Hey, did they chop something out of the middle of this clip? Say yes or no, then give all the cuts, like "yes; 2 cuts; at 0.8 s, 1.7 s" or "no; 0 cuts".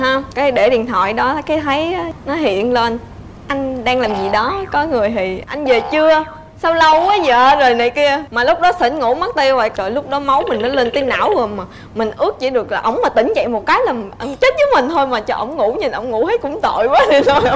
no; 0 cuts